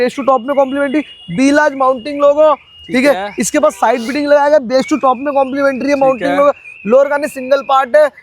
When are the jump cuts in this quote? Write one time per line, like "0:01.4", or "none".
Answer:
none